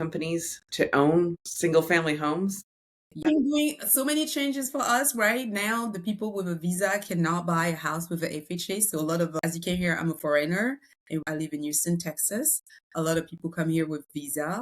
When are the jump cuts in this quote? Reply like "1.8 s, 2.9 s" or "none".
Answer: 1.4 s, 3.2 s, 9.3 s, 11.2 s

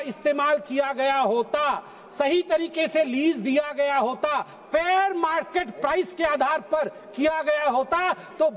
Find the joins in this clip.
none

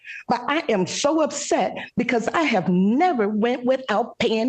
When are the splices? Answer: none

